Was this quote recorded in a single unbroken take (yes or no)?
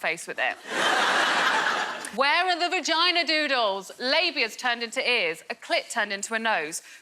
no